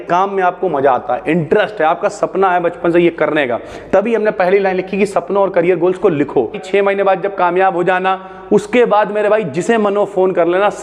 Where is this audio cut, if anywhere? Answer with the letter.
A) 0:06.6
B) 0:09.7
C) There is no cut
A